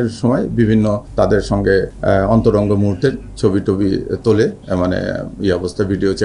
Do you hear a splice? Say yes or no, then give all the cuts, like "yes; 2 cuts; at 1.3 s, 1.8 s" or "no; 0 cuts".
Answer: yes; 2 cuts; at 1.1 s, 1.9 s